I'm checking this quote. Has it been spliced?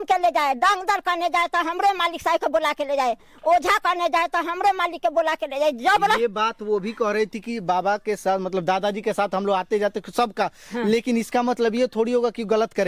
no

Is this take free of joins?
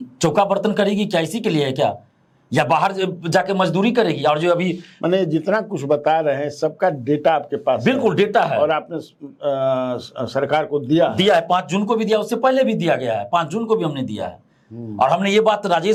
yes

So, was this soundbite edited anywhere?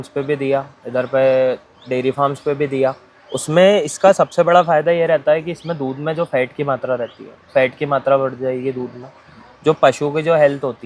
no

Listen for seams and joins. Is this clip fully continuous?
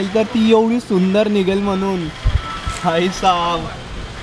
yes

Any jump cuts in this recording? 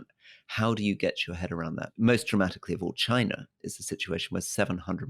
yes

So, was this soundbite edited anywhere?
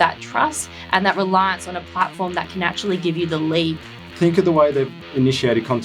yes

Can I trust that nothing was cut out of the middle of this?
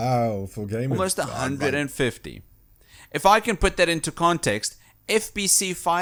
yes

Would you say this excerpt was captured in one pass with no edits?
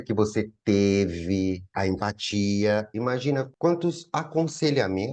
no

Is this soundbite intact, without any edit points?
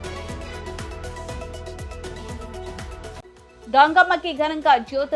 yes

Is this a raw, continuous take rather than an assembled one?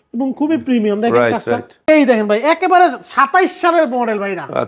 no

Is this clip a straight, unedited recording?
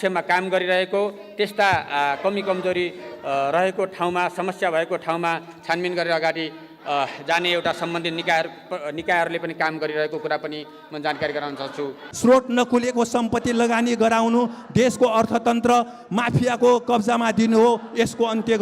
no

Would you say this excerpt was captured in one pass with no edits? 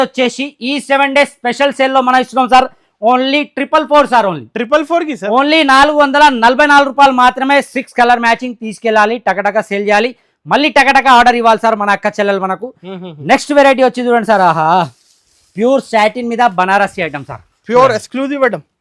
yes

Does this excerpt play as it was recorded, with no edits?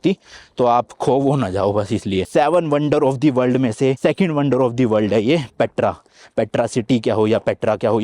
no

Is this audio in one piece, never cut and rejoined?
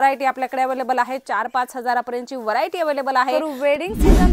no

